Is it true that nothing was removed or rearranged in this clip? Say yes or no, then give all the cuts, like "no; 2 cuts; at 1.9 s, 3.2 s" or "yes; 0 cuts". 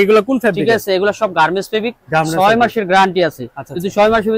yes; 0 cuts